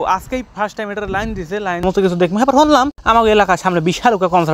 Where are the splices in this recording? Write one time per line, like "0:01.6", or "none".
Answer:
0:01.8